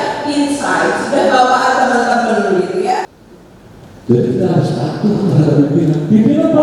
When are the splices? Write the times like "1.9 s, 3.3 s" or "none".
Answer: 3.0 s